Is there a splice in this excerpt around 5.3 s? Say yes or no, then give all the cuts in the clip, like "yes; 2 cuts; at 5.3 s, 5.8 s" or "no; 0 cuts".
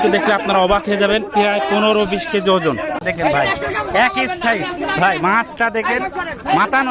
no; 1 cut; at 3.0 s